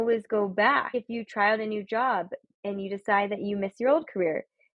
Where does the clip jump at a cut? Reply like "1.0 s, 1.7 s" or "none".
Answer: 0.9 s